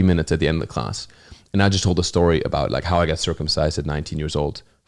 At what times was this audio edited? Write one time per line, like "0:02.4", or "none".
none